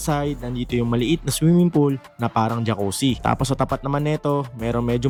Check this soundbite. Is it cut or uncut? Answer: uncut